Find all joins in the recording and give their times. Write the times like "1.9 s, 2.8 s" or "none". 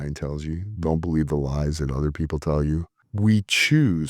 3.0 s

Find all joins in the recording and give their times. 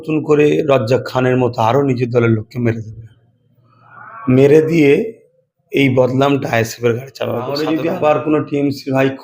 7.5 s

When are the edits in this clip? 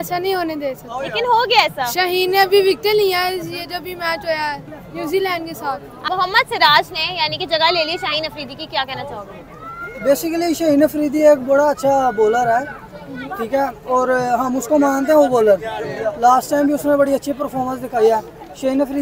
none

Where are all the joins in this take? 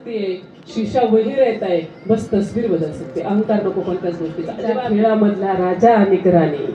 4.7 s

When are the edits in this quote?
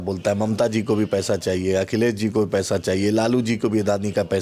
none

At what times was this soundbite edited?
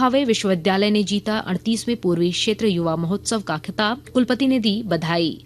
4.0 s

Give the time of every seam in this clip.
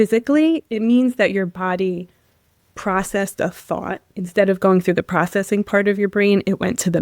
4.1 s

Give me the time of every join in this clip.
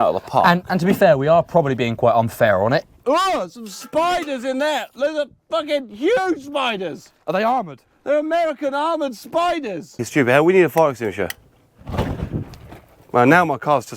2.9 s, 10.0 s

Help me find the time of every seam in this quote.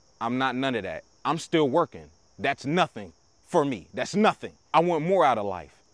4.5 s

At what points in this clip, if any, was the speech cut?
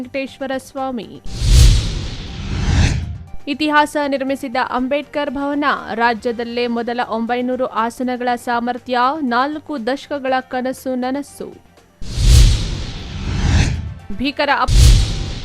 14.5 s

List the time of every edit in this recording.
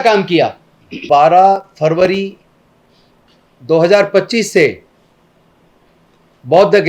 1.0 s

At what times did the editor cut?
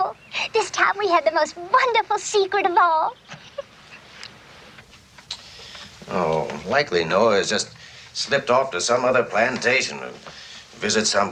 none

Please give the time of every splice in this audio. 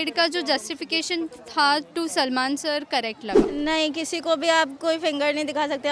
3.4 s

